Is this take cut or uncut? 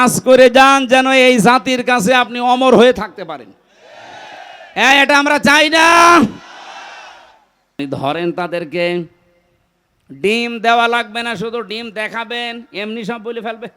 cut